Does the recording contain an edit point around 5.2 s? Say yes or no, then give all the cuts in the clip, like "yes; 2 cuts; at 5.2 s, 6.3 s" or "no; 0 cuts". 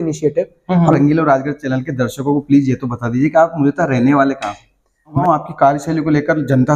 yes; 2 cuts; at 0.9 s, 5.2 s